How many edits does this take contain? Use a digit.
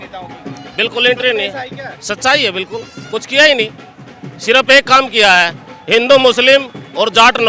0